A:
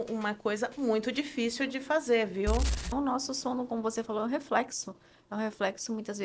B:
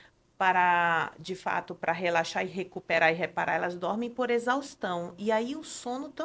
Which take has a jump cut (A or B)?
A